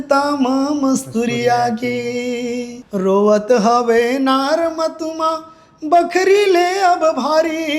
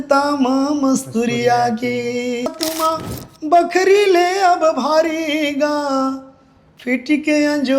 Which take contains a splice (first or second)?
second